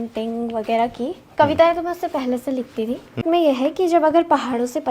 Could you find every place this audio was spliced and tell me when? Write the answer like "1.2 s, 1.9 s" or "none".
3.2 s